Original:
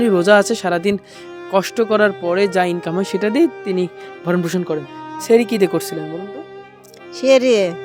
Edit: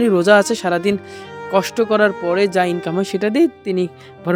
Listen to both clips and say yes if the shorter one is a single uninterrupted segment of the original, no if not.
yes